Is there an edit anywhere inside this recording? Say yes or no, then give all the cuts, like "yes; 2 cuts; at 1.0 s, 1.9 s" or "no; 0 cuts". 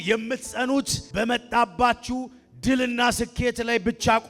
yes; 1 cut; at 1.0 s